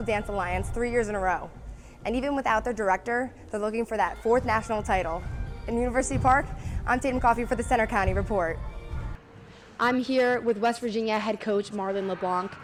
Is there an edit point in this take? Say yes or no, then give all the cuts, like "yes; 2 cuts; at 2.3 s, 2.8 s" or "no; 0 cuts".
no; 0 cuts